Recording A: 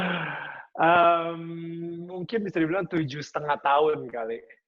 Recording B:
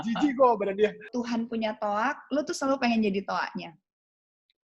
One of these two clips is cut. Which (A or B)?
B